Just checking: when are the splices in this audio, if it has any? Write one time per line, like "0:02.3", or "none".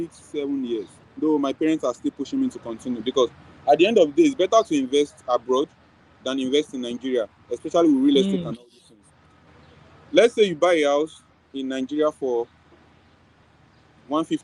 0:01.0